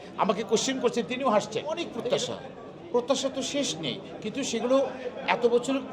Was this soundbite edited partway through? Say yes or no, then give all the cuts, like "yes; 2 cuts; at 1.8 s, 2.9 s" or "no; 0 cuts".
yes; 1 cut; at 1.9 s